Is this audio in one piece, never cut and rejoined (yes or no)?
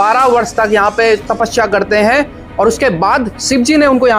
yes